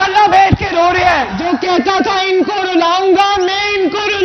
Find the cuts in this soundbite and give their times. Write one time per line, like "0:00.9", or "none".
0:01.4